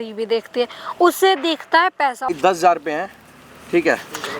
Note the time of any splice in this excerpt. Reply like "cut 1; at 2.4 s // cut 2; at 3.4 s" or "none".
cut 1; at 2.3 s